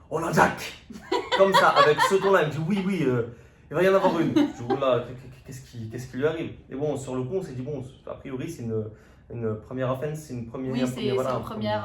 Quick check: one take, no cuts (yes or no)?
yes